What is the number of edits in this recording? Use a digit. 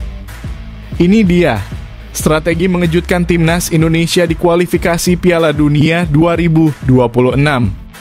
1